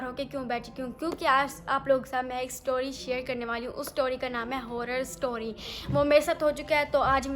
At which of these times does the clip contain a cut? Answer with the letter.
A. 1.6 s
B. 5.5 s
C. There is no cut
B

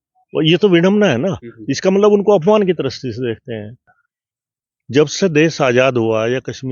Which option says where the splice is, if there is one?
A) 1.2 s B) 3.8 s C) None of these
B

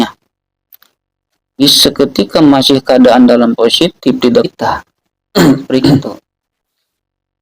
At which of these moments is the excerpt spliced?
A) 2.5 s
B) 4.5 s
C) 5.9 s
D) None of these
B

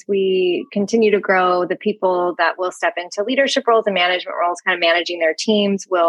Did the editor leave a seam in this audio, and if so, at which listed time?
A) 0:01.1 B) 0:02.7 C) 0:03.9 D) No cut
D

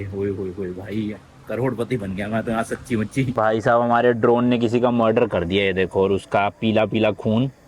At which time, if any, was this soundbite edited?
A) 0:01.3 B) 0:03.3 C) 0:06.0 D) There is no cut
B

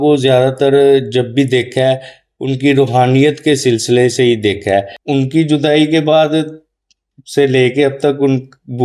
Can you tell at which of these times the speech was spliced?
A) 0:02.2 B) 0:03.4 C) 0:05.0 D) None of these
C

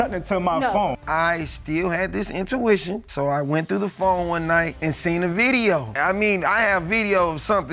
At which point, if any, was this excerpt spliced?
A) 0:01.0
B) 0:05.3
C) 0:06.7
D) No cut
A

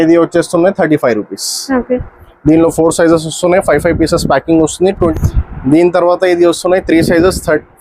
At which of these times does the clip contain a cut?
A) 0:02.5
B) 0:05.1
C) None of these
B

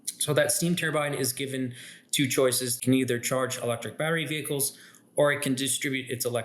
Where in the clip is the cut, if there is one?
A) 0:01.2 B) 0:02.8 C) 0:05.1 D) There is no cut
B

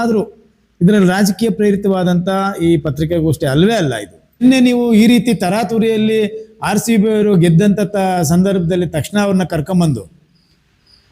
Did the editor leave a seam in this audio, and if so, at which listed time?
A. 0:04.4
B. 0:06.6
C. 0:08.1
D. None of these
A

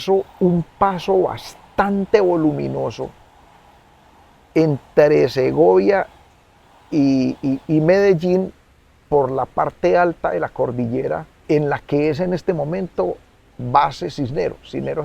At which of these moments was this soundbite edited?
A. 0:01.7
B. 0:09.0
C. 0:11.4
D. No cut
C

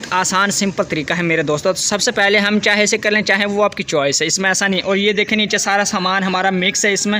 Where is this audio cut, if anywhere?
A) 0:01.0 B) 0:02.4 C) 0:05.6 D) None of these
D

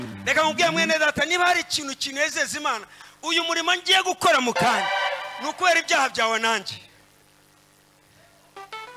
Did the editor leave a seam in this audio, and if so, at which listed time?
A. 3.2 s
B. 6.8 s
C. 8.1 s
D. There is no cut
D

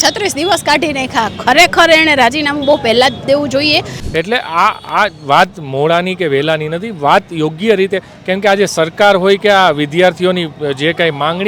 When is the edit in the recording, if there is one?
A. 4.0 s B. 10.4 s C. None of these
A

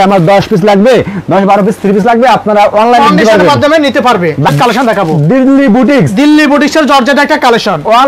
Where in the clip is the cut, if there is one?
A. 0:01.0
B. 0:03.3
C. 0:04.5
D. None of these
C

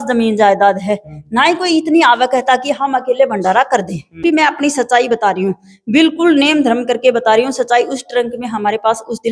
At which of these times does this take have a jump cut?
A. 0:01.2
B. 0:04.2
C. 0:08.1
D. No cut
B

